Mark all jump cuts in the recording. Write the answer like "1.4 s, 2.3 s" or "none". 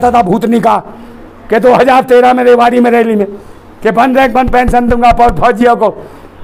none